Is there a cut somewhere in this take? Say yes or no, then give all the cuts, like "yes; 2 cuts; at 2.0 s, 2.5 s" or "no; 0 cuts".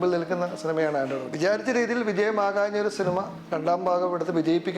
yes; 1 cut; at 1.3 s